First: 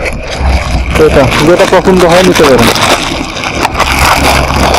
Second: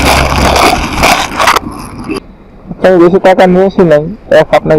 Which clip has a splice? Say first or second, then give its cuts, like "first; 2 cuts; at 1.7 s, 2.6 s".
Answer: second; 1 cut; at 2.2 s